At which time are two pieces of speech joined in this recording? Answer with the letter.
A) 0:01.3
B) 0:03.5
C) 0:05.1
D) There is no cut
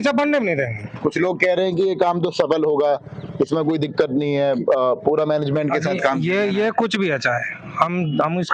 D